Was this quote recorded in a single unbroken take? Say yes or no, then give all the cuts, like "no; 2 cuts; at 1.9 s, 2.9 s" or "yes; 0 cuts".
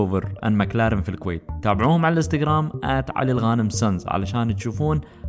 yes; 0 cuts